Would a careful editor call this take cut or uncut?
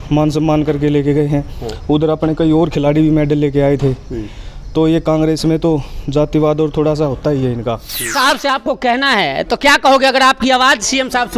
cut